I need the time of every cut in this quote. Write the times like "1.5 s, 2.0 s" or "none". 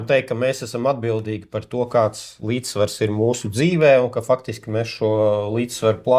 none